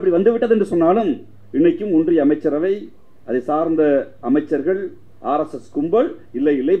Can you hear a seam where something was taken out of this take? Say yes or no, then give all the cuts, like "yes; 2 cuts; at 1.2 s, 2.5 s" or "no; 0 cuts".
no; 0 cuts